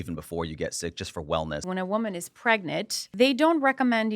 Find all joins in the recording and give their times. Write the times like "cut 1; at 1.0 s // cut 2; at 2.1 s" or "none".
cut 1; at 1.6 s // cut 2; at 3.1 s